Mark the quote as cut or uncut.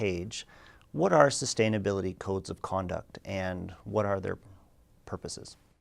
cut